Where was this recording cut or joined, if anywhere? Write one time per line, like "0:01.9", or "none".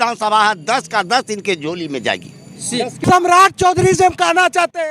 0:03.0